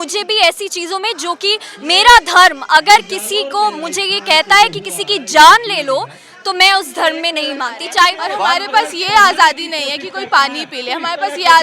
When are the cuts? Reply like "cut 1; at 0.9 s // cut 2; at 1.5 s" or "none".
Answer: cut 1; at 8.2 s